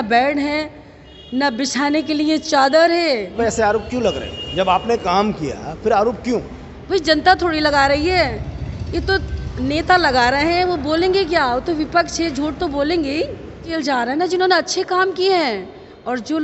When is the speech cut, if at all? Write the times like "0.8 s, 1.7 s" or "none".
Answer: 3.3 s, 13.7 s

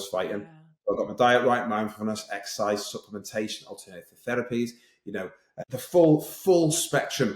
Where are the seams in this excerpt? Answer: 5.5 s

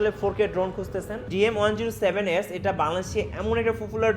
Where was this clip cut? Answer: 1.2 s

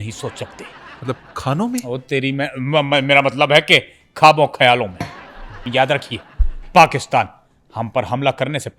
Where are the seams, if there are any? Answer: 5.6 s

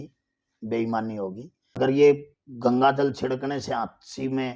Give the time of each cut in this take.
1.8 s

